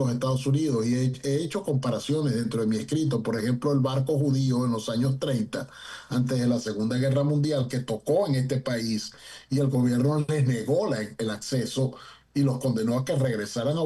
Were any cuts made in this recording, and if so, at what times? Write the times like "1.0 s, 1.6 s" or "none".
none